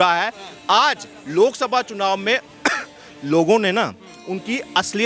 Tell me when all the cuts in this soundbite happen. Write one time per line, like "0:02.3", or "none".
none